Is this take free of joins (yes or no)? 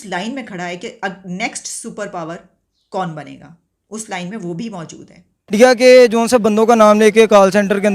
no